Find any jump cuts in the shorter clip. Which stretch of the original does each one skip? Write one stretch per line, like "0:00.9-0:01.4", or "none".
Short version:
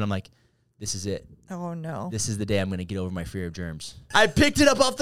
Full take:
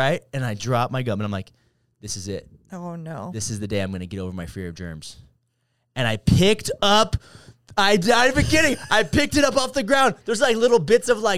0:05.3-0:08.8